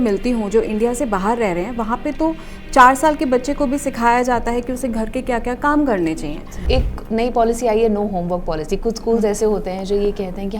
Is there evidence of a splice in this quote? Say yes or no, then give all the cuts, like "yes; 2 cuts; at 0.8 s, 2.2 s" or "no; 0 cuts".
yes; 1 cut; at 6.6 s